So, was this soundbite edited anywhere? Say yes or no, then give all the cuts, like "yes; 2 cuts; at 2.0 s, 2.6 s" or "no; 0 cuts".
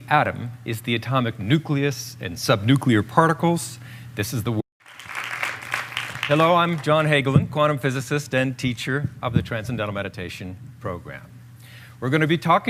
no; 0 cuts